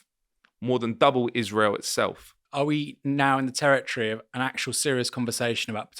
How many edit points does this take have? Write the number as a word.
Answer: one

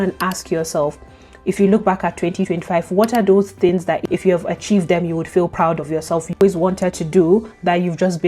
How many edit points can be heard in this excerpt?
one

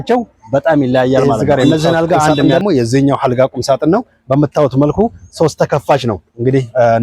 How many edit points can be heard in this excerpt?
one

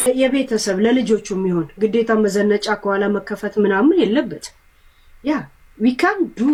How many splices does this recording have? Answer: zero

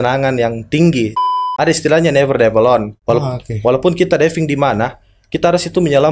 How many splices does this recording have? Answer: two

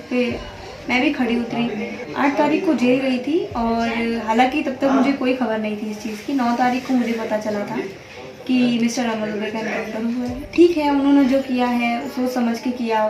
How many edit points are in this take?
two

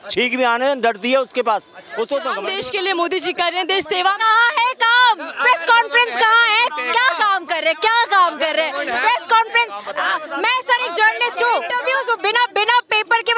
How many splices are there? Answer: two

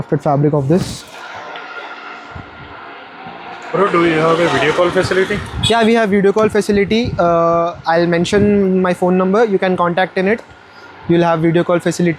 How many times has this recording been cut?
zero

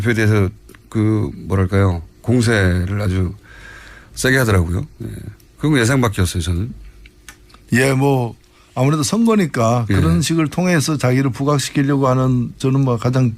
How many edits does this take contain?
one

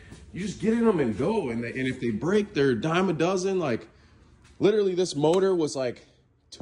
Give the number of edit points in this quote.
zero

